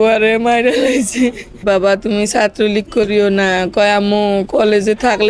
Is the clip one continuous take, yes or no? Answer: no